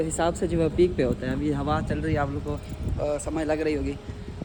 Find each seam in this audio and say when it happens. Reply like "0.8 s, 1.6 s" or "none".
none